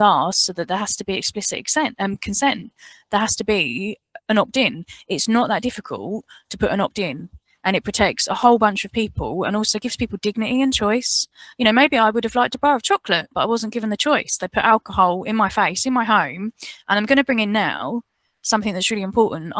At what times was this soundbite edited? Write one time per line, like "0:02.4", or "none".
none